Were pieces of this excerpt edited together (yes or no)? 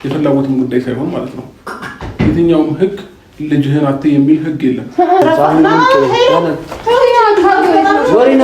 yes